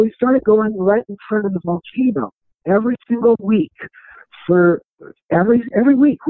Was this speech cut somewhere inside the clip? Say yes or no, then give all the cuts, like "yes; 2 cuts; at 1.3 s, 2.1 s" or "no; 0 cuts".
no; 0 cuts